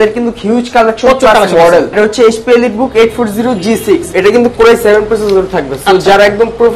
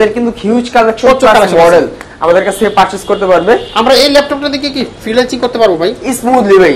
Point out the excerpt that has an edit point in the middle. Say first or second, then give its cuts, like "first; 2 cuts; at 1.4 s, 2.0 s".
first; 2 cuts; at 1.9 s, 4.1 s